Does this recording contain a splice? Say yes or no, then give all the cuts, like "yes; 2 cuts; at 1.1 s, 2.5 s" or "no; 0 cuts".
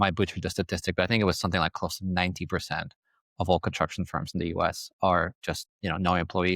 no; 0 cuts